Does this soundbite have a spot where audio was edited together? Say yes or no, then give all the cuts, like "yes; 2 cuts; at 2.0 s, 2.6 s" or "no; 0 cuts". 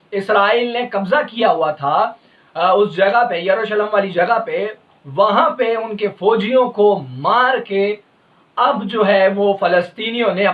no; 0 cuts